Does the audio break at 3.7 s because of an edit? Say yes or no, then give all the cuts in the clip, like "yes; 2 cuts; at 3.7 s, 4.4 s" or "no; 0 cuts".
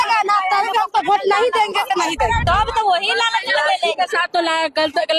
no; 1 cut; at 2.4 s